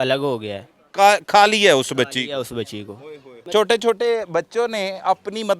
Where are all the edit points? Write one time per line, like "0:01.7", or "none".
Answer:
0:03.4